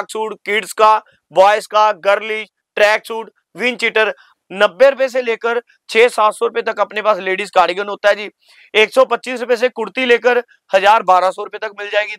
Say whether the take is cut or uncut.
cut